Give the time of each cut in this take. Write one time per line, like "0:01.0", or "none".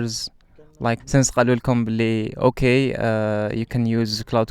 0:01.0